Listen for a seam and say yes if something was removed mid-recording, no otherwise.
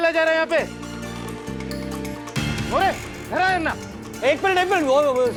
no